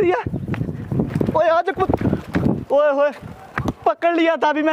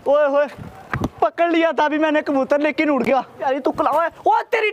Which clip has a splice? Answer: second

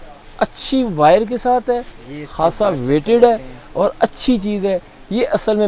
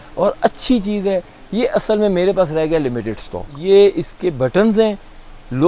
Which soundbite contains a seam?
second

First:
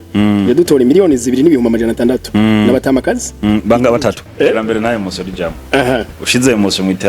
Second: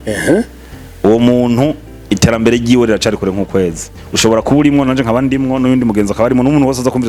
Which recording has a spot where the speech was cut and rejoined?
first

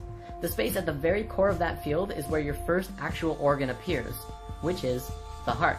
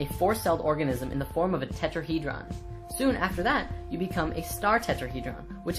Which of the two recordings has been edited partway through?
first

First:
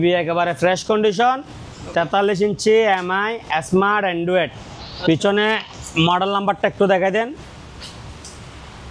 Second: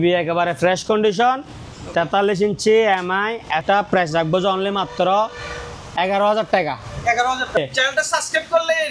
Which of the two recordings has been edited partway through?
second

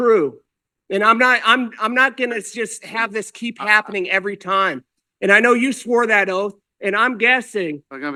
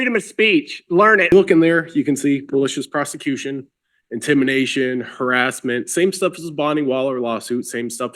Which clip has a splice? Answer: second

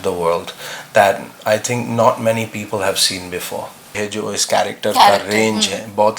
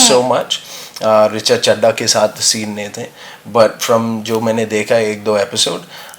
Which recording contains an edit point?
first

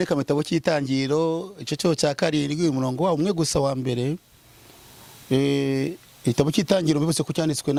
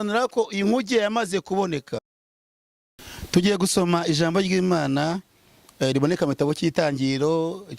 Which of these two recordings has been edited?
second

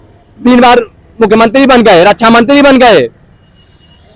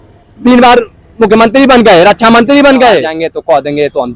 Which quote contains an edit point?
second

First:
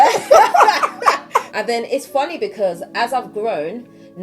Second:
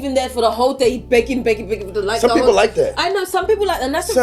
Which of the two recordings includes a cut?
first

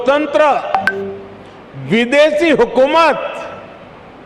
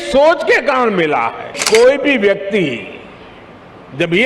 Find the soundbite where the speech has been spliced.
second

